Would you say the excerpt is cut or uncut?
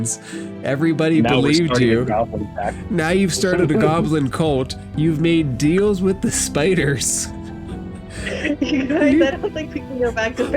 cut